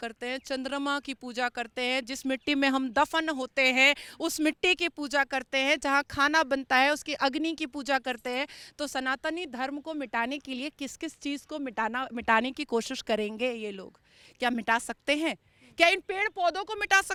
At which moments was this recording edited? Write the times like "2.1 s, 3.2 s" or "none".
none